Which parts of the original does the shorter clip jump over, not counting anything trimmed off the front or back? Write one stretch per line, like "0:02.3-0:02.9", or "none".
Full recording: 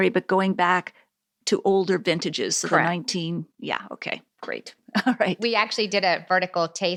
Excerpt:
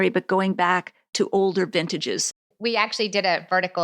0:01.0-0:01.3
0:02.7-0:05.2